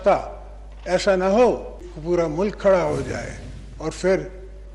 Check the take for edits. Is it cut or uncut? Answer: cut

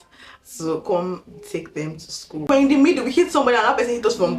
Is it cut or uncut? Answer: cut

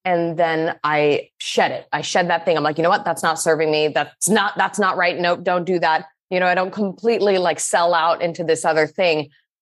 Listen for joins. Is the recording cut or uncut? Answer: uncut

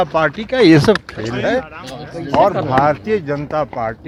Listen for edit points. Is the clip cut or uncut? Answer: uncut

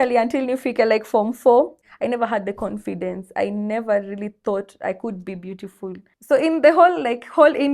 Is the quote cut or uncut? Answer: cut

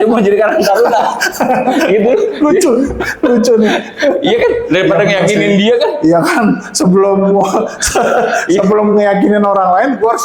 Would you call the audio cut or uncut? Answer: uncut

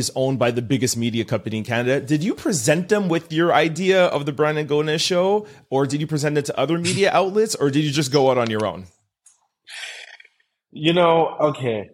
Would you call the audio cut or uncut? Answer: uncut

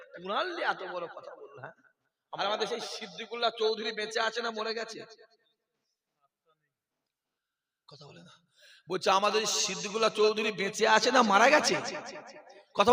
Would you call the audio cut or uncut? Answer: cut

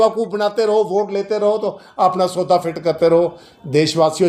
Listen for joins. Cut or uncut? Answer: uncut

